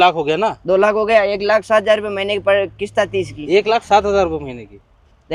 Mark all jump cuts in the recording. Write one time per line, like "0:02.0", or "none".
none